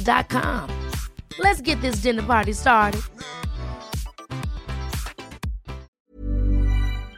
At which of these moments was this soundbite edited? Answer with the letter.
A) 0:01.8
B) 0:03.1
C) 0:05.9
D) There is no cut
C